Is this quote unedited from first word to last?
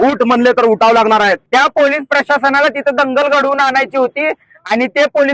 no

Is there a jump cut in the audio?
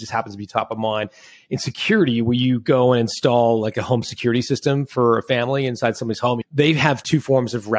yes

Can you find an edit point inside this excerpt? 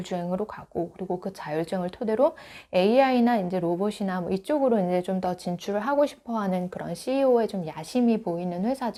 no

